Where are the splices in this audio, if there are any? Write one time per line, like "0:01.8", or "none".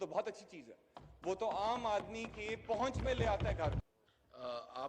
0:03.8

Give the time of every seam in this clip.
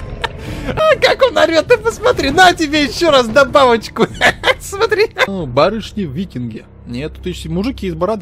0:00.8
0:05.3

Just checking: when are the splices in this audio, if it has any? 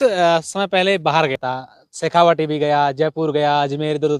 0:01.4

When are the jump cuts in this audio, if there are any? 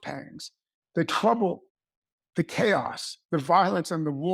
none

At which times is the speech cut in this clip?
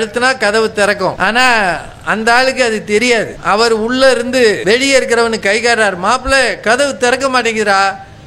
0:01.2
0:03.4
0:04.6

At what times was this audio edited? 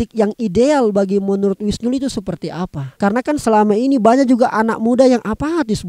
none

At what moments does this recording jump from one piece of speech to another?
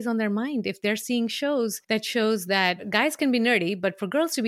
0:01.8
0:02.9

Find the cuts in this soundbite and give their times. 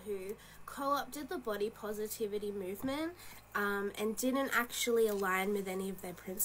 0:05.1

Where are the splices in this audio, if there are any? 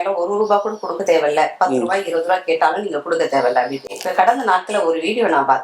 none

